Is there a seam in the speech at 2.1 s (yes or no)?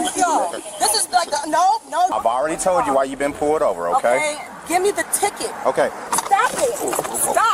yes